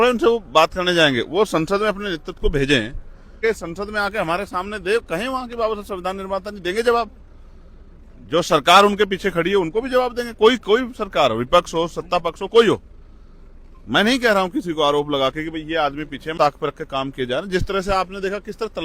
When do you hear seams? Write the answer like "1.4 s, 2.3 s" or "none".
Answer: 3.4 s, 16.3 s